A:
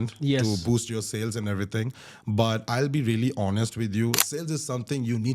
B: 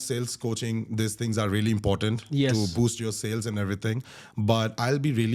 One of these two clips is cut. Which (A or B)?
A